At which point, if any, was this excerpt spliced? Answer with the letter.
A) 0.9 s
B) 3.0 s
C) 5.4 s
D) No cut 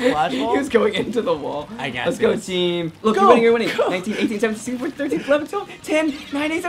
B